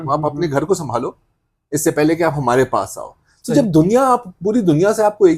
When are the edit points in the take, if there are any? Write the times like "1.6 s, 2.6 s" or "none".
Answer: none